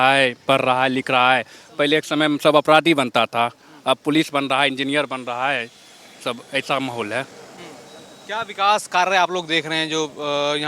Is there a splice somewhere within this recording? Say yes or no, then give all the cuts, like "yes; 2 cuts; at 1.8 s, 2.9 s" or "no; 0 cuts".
no; 0 cuts